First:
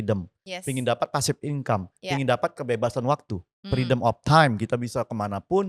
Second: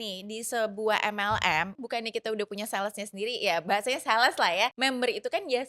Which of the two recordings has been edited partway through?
second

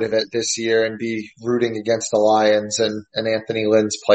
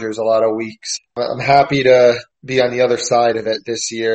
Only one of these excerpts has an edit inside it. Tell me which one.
second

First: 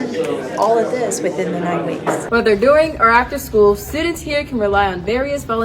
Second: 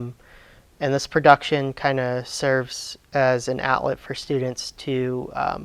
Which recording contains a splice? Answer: first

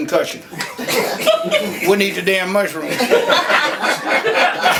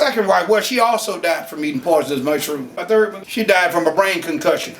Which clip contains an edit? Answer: second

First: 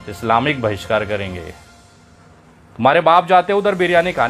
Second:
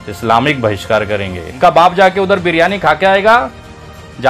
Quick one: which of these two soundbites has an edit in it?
second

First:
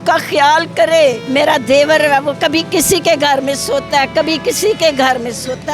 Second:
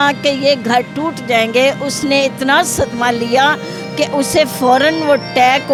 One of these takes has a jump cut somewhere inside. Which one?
first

